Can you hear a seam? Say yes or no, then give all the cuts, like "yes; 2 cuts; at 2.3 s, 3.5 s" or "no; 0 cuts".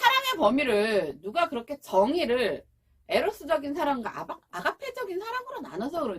no; 0 cuts